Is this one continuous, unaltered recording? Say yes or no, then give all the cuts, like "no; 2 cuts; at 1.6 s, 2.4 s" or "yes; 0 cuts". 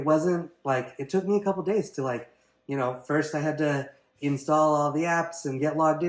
yes; 0 cuts